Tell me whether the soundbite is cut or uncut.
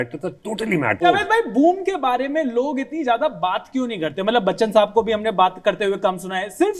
cut